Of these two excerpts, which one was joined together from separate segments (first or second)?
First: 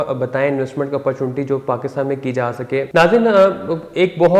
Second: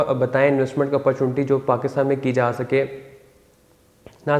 first